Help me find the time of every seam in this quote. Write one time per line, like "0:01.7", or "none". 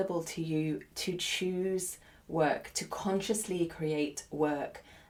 none